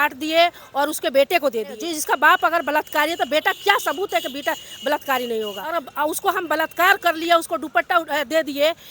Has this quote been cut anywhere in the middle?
yes; 2 cuts; at 1.8 s, 5.8 s

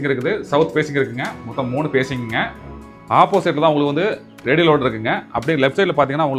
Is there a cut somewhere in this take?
yes; 1 cut; at 2.7 s

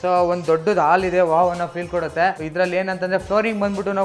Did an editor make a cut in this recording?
yes; 1 cut; at 2.4 s

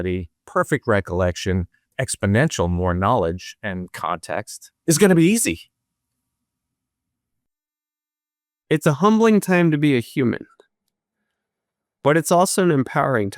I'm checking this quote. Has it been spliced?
yes; 2 cuts; at 1.9 s, 4.6 s

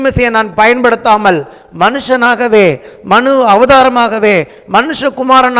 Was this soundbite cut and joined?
no; 0 cuts

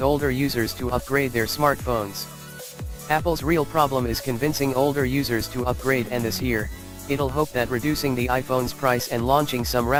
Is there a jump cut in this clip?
no; 0 cuts

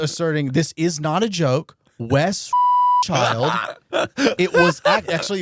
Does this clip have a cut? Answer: no; 0 cuts

